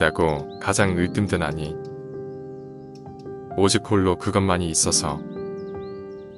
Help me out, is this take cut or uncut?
cut